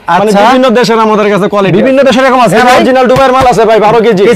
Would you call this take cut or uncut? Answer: uncut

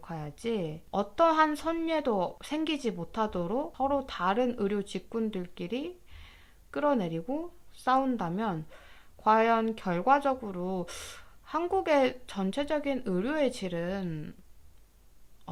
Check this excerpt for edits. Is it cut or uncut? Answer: uncut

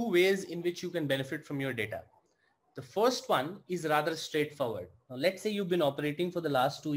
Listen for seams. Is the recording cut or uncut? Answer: uncut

